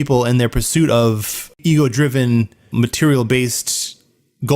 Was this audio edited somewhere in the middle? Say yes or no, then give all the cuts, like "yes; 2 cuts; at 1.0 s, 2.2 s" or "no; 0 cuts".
yes; 2 cuts; at 1.6 s, 2.7 s